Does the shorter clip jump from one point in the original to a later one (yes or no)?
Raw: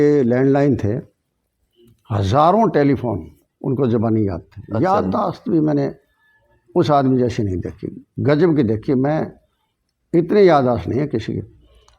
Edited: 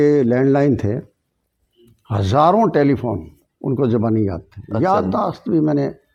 no